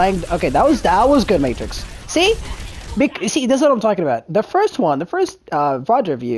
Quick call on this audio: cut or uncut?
uncut